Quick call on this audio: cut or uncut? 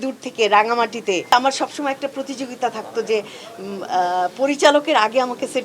cut